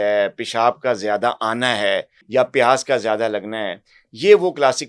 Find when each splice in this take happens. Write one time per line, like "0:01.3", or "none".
0:02.1